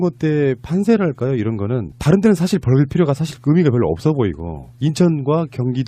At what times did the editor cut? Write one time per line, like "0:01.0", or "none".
0:04.4

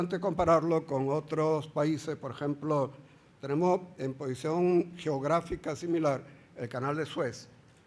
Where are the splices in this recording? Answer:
0:04.5

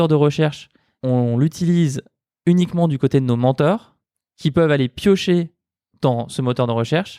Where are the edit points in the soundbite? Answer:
0:00.9

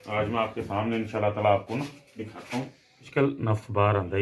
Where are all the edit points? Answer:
0:03.1

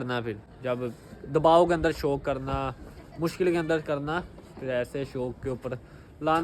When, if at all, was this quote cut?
none

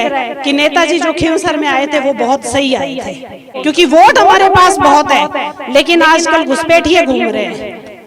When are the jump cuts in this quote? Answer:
0:03.5

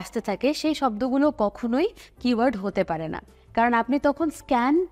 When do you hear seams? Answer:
none

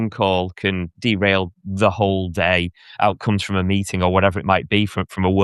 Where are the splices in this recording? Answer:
0:00.9

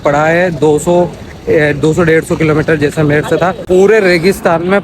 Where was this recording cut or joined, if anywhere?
0:03.6

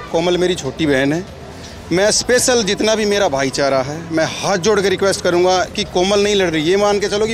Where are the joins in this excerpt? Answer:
none

